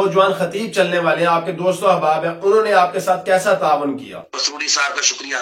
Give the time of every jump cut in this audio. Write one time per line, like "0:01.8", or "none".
0:04.3